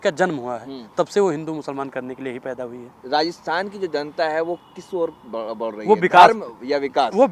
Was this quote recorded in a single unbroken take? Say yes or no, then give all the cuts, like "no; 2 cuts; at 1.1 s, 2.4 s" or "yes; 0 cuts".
yes; 0 cuts